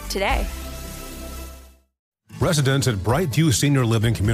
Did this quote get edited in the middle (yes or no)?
yes